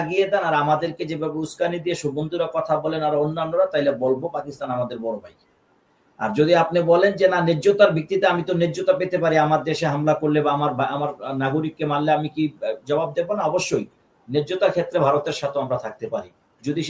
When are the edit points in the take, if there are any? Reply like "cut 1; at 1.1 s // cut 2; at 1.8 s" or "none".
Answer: none